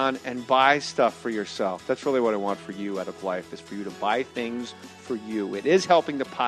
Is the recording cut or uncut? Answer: uncut